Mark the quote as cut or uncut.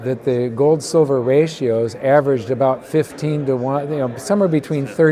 uncut